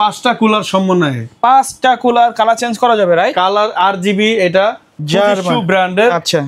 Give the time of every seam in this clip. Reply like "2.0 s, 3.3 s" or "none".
4.9 s